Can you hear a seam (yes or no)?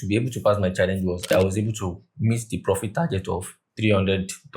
yes